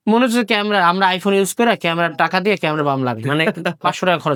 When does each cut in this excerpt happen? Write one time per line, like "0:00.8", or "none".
none